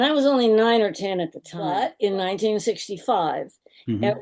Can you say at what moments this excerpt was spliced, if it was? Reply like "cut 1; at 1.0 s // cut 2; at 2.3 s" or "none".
cut 1; at 1.7 s